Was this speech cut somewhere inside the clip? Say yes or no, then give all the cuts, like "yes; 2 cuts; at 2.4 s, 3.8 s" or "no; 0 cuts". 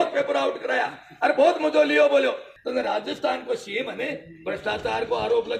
yes; 1 cut; at 2.5 s